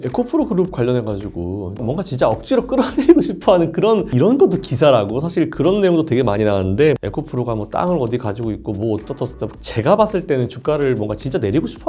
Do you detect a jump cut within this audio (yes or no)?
yes